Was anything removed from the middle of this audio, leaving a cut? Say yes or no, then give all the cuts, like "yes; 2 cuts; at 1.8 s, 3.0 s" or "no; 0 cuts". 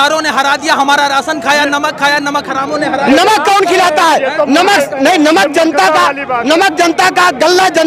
no; 0 cuts